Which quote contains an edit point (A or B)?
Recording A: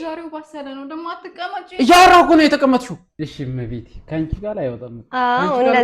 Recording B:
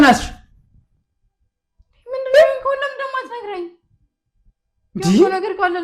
A